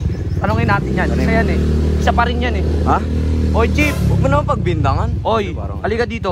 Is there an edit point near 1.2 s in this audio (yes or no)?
no